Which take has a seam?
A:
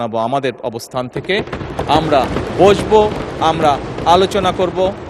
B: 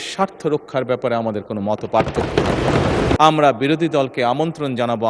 B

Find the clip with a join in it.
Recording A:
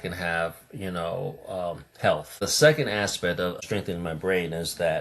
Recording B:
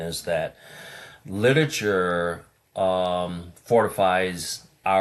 A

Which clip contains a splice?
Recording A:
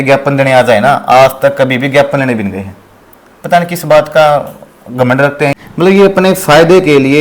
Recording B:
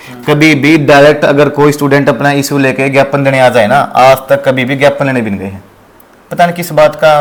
A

